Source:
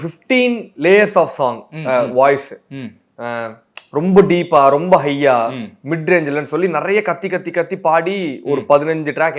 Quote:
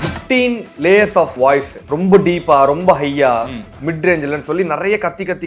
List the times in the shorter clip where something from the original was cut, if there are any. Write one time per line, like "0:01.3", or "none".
0:01.3

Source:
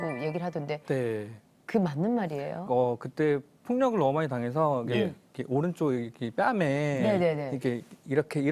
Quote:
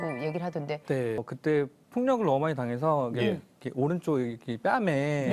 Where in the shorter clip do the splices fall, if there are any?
0:01.3

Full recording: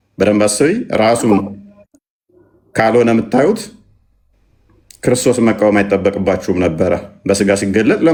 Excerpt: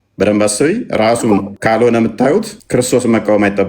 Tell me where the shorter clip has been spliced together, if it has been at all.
0:01.5
0:02.6

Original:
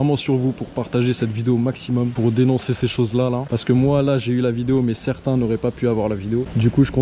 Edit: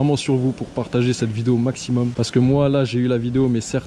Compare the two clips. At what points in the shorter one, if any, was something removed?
0:02.1

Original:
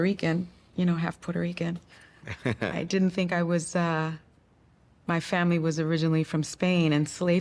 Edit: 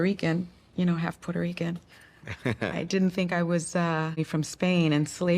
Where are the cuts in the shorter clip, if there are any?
0:04.2

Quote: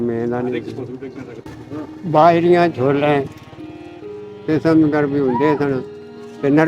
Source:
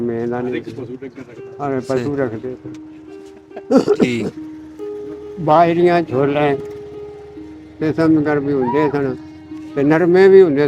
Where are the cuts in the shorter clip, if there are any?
0:01.4

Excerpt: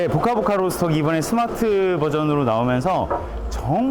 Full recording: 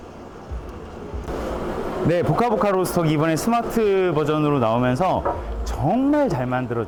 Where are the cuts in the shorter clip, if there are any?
none

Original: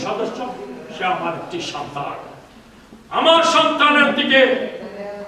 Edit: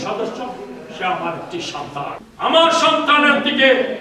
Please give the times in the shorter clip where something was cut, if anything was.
0:02.2

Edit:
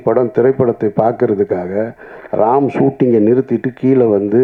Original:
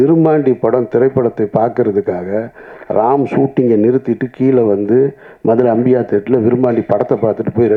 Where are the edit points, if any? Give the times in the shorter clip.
none

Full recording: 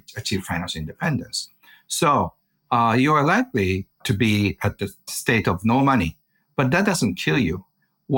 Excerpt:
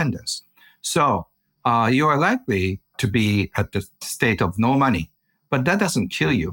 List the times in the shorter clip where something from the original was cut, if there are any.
none

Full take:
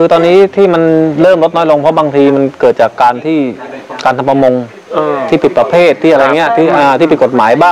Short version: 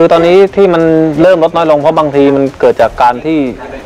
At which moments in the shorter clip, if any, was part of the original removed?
none

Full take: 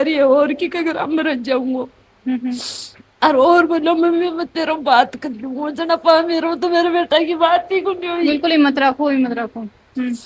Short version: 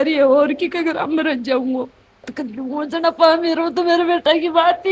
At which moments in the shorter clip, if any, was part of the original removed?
0:02.2

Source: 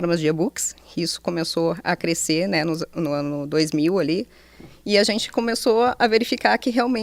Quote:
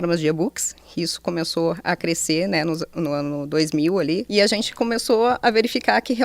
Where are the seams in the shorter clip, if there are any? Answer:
0:04.2

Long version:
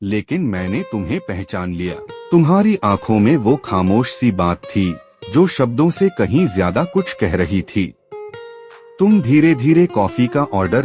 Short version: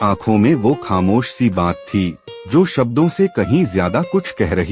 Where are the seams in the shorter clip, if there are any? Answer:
none

